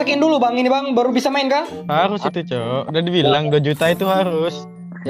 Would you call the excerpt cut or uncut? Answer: cut